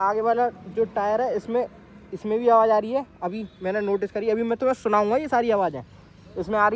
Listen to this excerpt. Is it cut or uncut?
uncut